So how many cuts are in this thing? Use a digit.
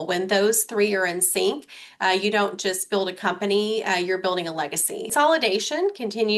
1